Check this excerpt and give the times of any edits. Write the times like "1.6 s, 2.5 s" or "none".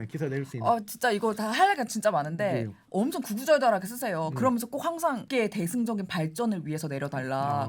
2.9 s, 5.2 s